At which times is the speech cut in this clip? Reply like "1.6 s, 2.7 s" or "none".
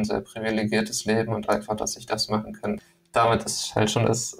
2.9 s